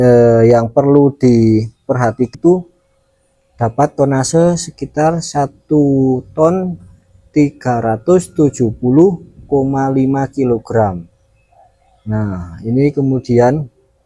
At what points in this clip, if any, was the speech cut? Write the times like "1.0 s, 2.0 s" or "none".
2.3 s